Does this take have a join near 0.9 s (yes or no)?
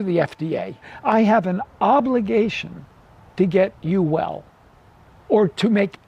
yes